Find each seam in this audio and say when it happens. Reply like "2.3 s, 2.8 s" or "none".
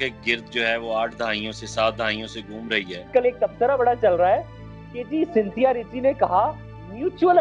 3.1 s